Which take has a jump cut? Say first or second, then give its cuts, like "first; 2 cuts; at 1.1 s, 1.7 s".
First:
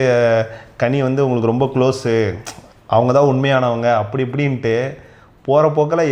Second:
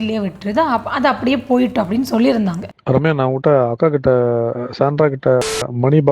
second; 1 cut; at 2.7 s